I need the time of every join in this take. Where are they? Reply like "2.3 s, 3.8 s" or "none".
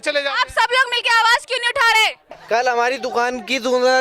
2.3 s